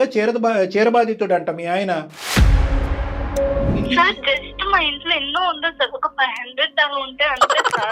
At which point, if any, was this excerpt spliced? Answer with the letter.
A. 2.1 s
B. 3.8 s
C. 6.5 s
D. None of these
B